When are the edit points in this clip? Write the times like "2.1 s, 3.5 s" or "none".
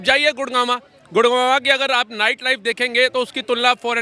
none